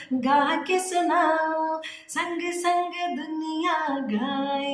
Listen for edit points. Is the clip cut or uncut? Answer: uncut